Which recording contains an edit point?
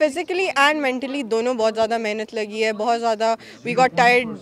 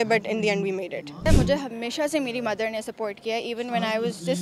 second; 1 cut; at 1.2 s

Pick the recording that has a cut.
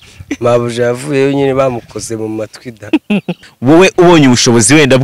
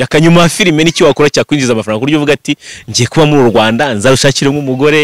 first; 1 cut; at 3.3 s

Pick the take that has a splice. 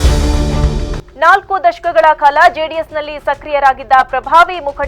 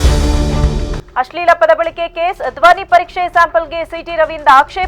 first; 1 cut; at 1.0 s

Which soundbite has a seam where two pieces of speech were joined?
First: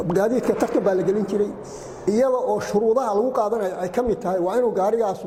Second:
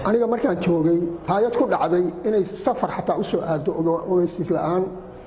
second; 1 cut; at 1.2 s

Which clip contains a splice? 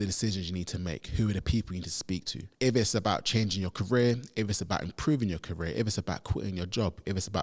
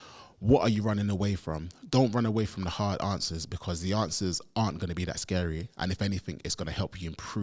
first; 1 cut; at 2.4 s

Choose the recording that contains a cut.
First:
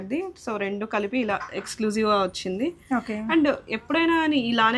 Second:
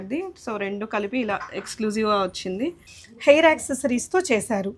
second; 1 cut; at 2.9 s

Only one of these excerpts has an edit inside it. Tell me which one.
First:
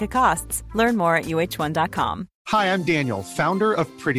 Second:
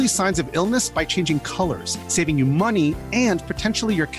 first; 1 cut; at 2.3 s

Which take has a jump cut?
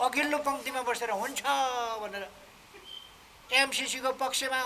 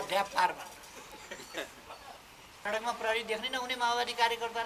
second; 1 cut; at 2.5 s

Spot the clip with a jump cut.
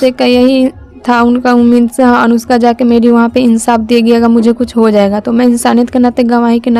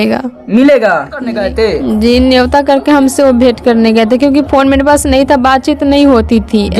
second; 1 cut; at 1.5 s

